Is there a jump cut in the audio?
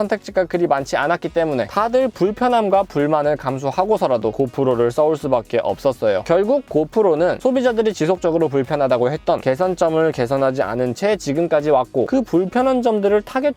yes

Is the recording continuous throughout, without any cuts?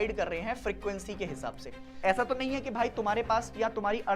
no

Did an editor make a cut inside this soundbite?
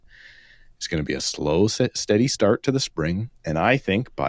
no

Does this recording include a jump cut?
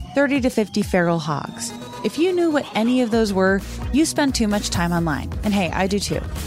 no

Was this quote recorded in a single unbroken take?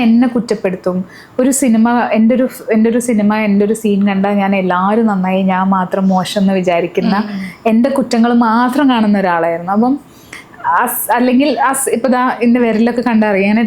yes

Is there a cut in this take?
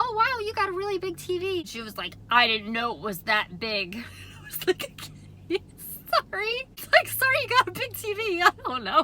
yes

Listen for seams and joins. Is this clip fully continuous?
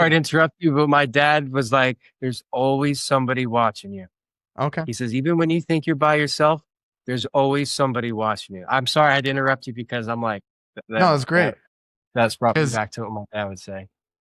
yes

